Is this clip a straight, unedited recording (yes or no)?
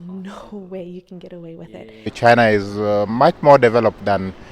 no